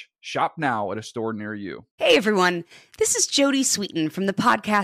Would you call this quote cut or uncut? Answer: cut